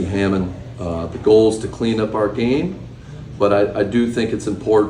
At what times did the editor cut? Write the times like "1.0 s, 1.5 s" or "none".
3.7 s